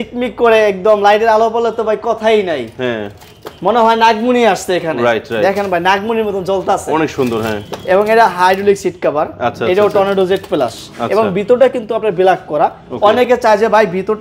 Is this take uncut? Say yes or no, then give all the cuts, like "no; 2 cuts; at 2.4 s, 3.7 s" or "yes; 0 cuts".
yes; 0 cuts